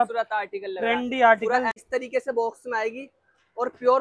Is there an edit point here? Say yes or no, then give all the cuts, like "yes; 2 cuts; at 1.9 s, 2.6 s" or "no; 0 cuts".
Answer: yes; 1 cut; at 1.8 s